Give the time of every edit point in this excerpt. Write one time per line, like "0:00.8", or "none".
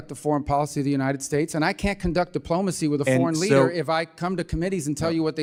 none